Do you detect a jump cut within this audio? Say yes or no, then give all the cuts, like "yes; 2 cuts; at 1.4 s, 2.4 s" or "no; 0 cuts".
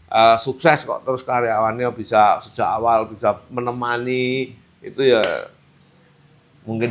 no; 0 cuts